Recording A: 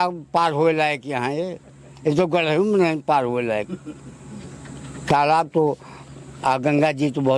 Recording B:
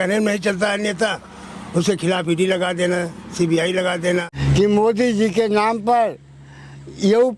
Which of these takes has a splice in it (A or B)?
B